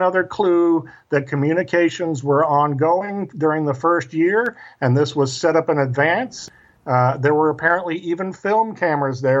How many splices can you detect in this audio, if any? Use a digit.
1